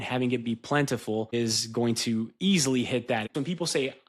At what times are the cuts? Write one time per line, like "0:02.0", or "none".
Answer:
0:01.3
0:03.3